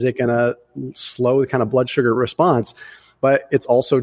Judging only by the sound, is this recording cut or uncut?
uncut